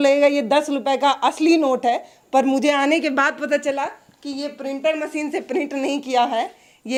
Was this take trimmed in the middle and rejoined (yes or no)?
no